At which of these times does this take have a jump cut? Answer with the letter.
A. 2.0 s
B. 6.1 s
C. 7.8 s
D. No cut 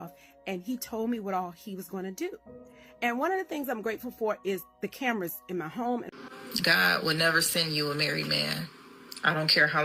B